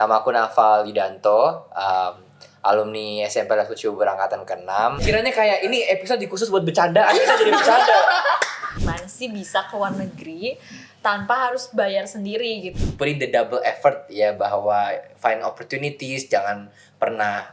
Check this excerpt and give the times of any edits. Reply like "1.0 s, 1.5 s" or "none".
5.0 s, 8.8 s, 12.7 s